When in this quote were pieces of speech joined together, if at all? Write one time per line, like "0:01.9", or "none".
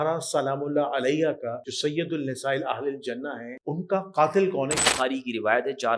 0:01.7
0:03.5
0:04.8

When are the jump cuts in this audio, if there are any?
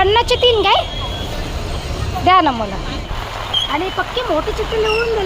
0:03.1

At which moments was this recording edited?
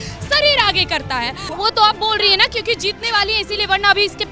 0:01.5

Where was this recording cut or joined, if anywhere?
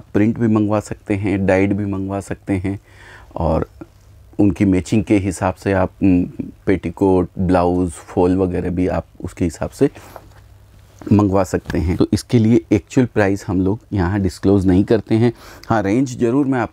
0:11.9

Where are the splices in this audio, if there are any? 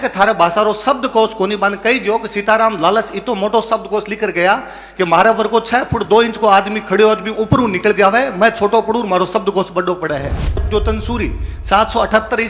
0:10.7

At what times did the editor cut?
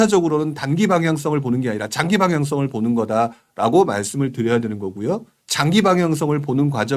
none

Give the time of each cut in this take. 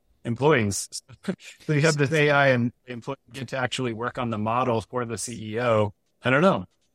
0:06.0

